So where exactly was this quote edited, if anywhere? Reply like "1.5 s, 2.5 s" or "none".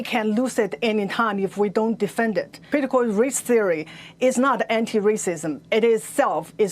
2.6 s